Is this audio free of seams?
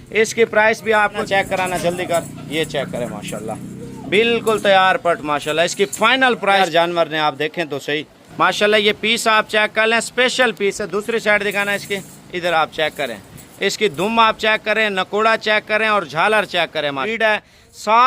no; 3 cuts; at 1.2 s, 6.6 s, 17.0 s

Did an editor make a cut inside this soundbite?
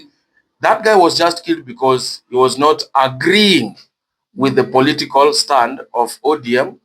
no; 0 cuts

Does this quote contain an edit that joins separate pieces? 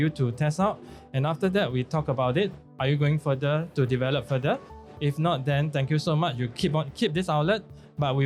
no; 0 cuts

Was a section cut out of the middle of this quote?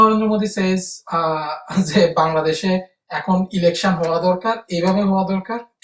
no; 0 cuts

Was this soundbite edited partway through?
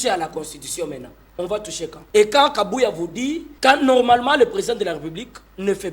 yes; 2 cuts; at 2.0 s, 3.5 s

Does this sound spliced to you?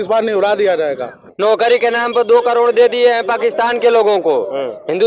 yes; 1 cut; at 1.2 s

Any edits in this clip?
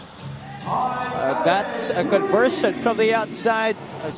no; 0 cuts

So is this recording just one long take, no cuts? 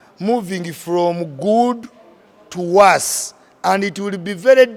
yes; 0 cuts

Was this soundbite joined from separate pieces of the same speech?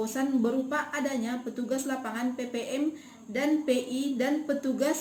no; 0 cuts

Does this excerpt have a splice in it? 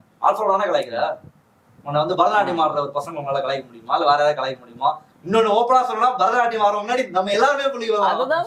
no; 0 cuts

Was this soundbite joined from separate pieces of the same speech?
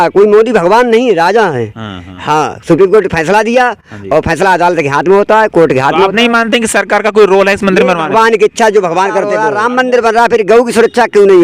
yes; 1 cut; at 9.4 s

